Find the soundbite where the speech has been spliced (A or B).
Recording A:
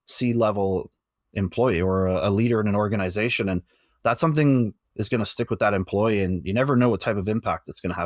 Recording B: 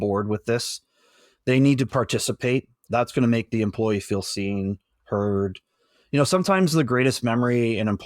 B